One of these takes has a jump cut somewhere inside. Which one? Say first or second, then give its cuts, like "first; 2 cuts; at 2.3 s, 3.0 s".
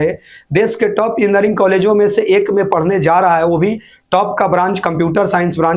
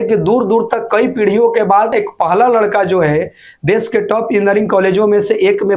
second; 1 cut; at 1.9 s